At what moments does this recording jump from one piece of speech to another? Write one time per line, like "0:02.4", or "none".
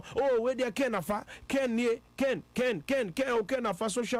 none